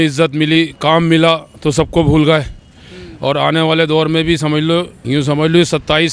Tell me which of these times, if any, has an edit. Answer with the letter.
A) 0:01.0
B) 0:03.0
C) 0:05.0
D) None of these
C